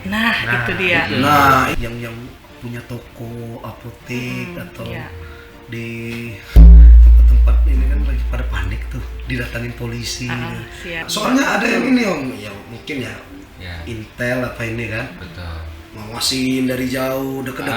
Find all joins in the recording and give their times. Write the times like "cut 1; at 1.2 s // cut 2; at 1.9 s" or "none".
cut 1; at 1.7 s // cut 2; at 11.0 s

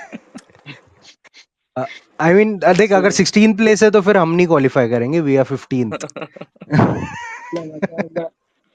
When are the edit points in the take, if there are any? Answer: none

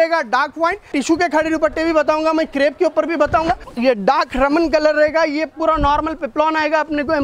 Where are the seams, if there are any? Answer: cut 1; at 0.9 s // cut 2; at 3.7 s

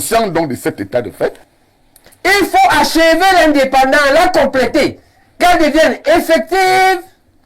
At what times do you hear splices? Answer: cut 1; at 1.5 s

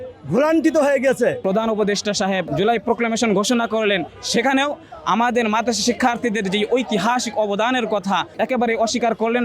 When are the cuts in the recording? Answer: cut 1; at 1.4 s // cut 2; at 2.5 s // cut 3; at 8.3 s

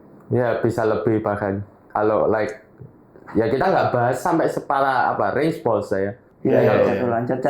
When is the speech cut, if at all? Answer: cut 1; at 6.3 s

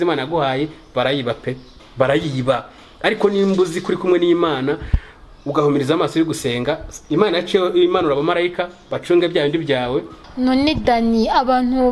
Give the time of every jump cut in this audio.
cut 1; at 10.2 s

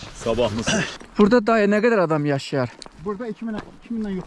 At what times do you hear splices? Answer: cut 1; at 0.9 s

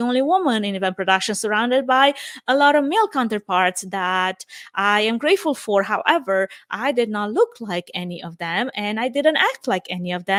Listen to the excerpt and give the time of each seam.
none

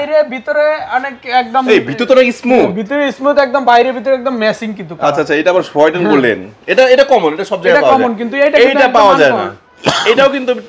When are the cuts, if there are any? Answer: none

